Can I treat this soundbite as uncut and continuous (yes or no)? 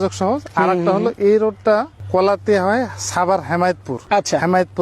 no